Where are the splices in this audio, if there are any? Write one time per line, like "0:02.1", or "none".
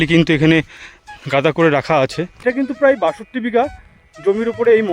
0:02.8